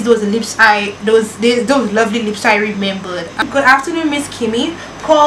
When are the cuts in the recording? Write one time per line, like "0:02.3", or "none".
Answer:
0:03.5